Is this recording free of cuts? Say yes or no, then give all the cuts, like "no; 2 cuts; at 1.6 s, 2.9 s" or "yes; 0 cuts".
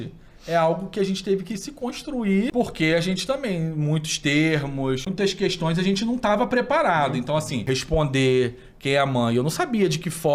no; 3 cuts; at 2.5 s, 5.1 s, 7.6 s